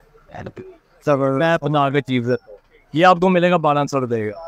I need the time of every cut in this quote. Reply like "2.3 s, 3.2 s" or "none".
none

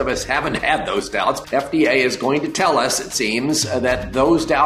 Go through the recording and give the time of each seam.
1.4 s

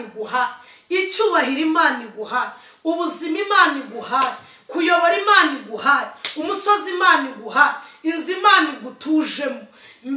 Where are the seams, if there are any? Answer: none

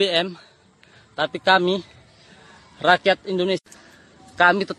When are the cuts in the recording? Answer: 3.6 s

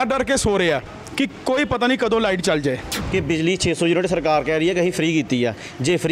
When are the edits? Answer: 2.9 s

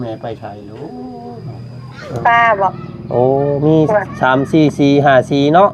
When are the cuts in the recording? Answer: 2.2 s

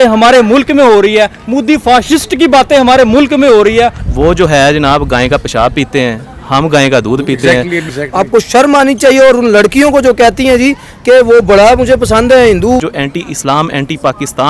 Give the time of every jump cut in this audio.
4.0 s, 7.9 s, 12.8 s

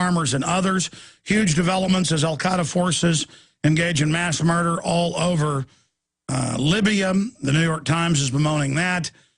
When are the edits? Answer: 6.5 s

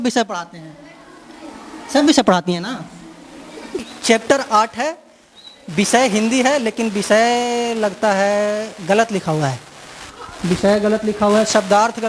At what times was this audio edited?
3.8 s

